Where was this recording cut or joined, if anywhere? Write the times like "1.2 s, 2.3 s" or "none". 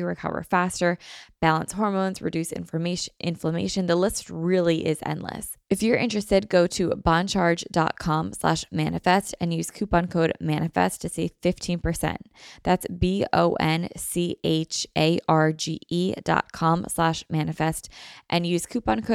5.5 s